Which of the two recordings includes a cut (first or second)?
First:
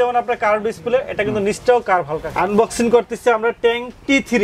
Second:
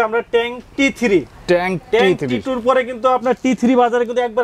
first